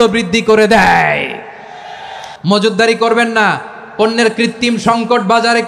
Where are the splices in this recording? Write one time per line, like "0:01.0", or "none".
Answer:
0:02.2